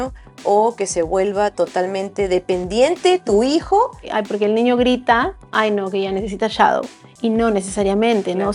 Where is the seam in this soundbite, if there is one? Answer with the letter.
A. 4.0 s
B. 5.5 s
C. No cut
A